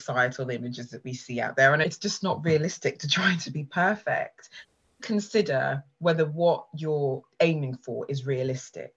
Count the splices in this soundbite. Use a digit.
2